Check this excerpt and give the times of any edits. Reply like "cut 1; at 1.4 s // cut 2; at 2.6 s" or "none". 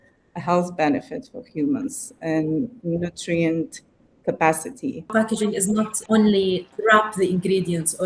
cut 1; at 5.5 s // cut 2; at 6.7 s